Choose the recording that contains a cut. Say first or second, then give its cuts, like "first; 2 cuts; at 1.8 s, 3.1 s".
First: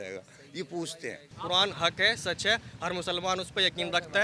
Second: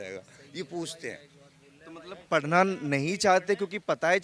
first; 1 cut; at 1.3 s